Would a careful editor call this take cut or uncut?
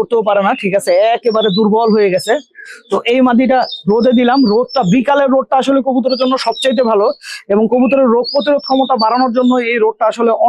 uncut